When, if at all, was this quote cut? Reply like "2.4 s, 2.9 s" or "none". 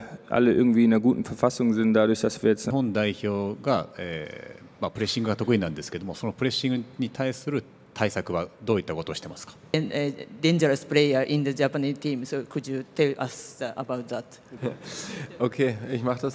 2.6 s, 9.7 s